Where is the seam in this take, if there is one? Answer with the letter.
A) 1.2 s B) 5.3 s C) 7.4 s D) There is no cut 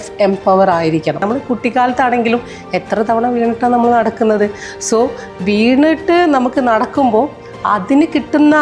A